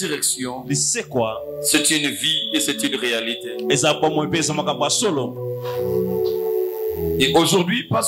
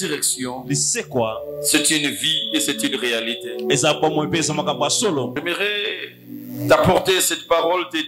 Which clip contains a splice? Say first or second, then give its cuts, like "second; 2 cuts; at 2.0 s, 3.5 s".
second; 1 cut; at 5.4 s